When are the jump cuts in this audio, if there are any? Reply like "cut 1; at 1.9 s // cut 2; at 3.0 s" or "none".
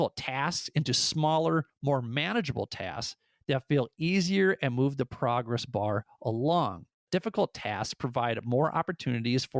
cut 1; at 7.0 s